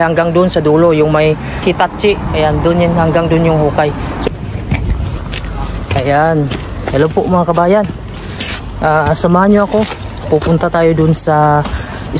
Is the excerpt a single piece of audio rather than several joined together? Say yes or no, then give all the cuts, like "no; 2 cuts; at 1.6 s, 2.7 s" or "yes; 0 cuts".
yes; 0 cuts